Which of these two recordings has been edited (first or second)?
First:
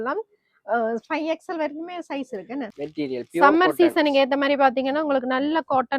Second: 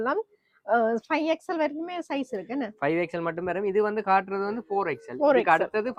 first